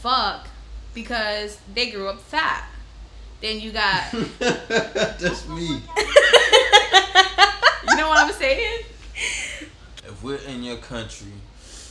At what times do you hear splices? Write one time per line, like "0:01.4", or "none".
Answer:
0:09.9